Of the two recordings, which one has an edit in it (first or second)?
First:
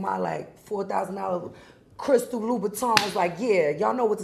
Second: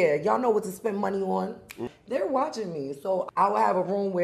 second